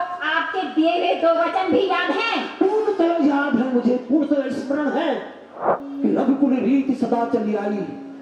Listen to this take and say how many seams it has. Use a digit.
1